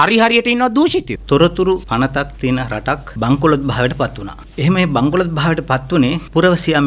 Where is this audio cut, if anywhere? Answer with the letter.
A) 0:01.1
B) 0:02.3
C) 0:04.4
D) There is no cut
A